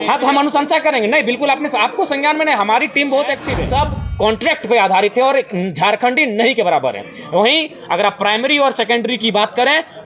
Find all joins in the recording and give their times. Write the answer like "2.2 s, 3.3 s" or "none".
3.5 s